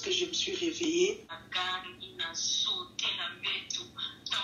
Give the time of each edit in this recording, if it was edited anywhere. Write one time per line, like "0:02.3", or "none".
0:01.3